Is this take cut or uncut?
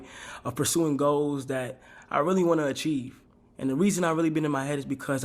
cut